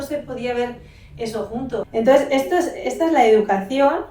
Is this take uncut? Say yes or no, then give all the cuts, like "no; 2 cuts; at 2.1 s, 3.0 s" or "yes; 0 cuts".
no; 1 cut; at 1.8 s